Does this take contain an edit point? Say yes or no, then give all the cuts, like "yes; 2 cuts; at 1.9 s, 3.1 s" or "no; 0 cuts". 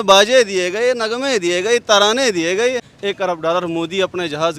yes; 1 cut; at 2.9 s